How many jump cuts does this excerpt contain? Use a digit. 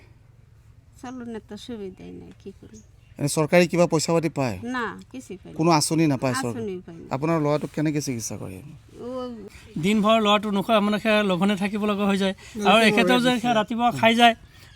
1